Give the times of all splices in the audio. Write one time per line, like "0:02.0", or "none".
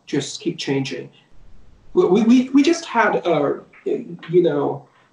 0:01.3